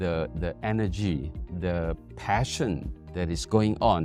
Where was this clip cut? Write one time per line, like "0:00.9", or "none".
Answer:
none